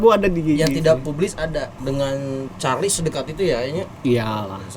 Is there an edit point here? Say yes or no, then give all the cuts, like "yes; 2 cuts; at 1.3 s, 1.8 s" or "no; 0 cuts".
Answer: yes; 1 cut; at 1.7 s